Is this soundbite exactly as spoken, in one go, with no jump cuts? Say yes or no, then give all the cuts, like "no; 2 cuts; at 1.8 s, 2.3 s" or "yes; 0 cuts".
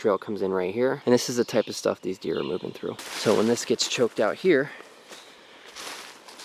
no; 2 cuts; at 1.0 s, 3.1 s